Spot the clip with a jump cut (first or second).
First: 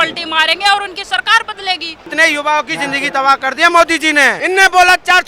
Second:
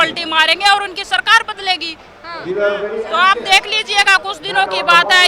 first